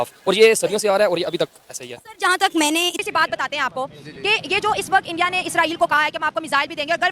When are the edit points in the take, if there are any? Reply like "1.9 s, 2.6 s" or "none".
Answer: 3.0 s

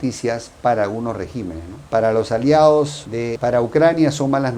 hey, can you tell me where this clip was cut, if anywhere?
none

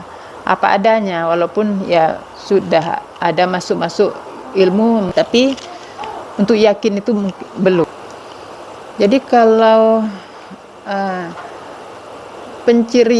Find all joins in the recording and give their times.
none

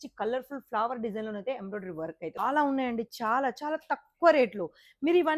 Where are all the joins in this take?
2.2 s

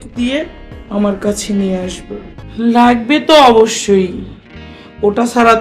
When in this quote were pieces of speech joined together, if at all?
2.4 s

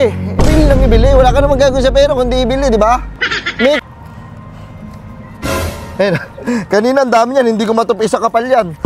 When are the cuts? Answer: 3.8 s

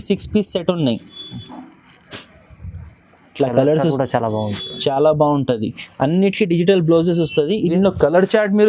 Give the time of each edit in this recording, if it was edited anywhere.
7.7 s

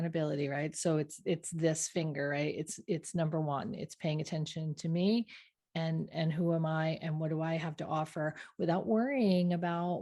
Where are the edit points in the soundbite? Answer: none

